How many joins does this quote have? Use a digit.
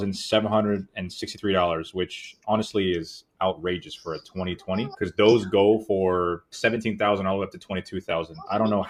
0